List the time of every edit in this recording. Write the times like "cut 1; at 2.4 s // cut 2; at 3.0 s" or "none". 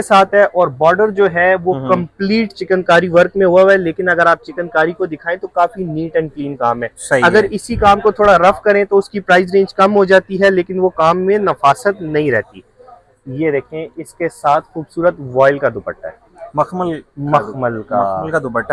none

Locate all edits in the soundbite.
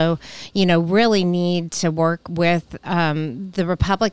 none

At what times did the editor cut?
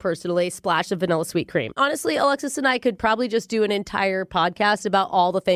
cut 1; at 1.7 s

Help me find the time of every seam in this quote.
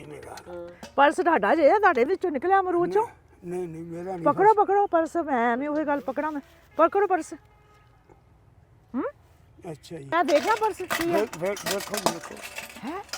cut 1; at 10.1 s

